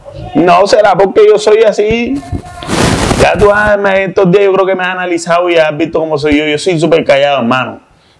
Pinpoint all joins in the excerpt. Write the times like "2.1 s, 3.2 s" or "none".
none